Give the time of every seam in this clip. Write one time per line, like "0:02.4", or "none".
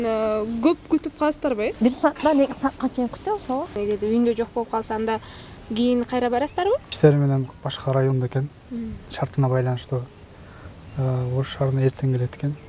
0:01.7
0:03.8
0:06.9